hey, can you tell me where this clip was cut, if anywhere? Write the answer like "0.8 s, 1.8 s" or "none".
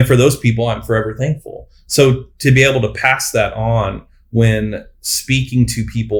none